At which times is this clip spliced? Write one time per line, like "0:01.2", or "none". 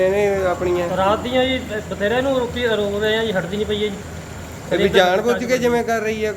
none